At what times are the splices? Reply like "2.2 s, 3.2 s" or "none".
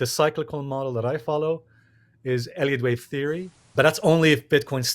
3.6 s